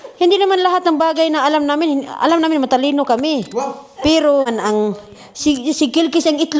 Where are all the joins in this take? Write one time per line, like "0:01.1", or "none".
0:04.5